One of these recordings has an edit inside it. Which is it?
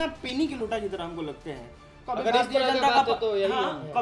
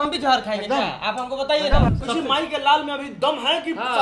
second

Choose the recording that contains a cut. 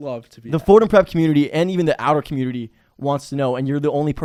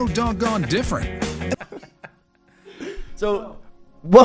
second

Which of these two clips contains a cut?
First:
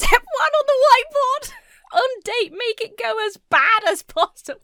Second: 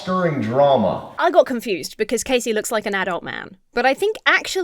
second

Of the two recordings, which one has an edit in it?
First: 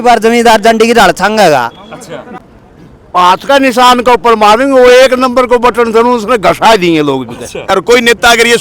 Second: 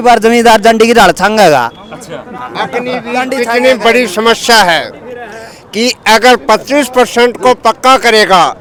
first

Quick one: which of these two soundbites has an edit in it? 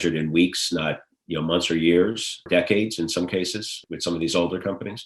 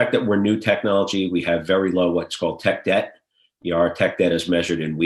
first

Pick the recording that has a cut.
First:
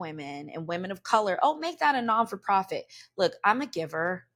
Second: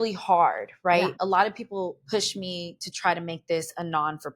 second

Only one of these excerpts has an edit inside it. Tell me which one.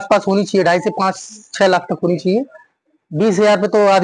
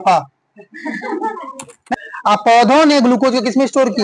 second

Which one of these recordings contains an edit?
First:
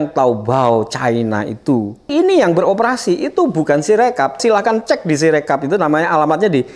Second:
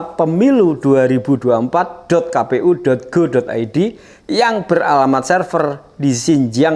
first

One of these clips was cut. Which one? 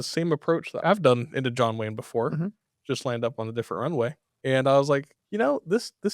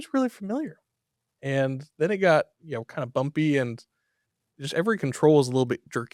first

